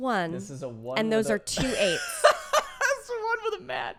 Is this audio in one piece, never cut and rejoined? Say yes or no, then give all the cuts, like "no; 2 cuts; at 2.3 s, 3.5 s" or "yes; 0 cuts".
yes; 0 cuts